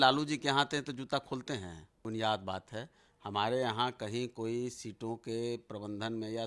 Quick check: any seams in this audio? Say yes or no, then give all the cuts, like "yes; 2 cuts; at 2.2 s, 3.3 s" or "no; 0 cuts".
yes; 1 cut; at 2.0 s